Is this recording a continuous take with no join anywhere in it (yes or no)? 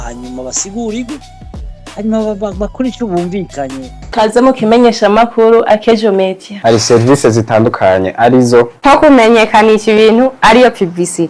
no